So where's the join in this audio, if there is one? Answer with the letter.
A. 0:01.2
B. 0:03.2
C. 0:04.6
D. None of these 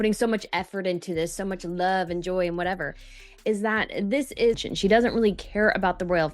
C